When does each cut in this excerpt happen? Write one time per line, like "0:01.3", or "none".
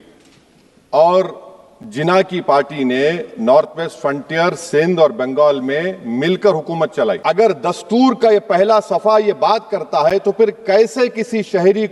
0:07.2